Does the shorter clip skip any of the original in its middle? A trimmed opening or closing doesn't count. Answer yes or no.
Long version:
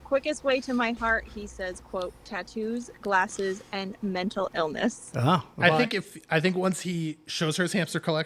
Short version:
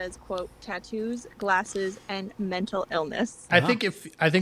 yes